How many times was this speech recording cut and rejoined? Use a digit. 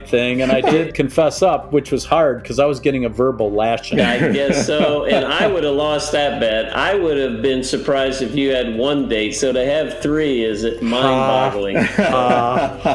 2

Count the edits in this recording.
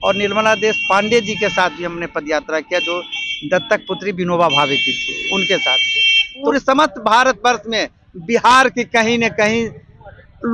1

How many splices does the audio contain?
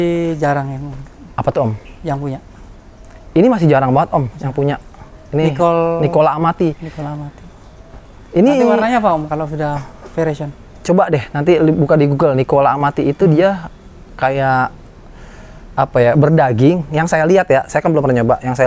0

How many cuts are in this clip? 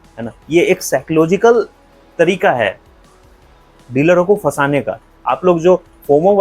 1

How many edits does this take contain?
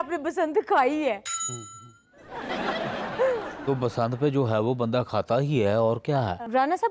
0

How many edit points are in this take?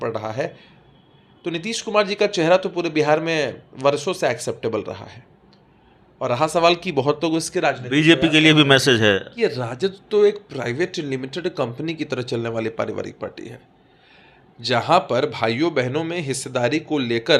1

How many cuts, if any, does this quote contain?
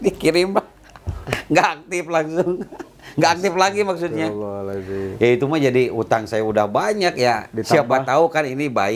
0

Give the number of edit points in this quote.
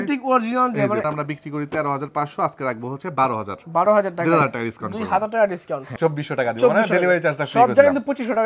2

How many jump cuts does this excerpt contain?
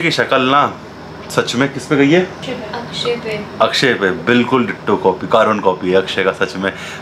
0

